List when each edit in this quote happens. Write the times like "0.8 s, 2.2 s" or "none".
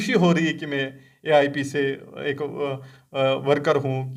none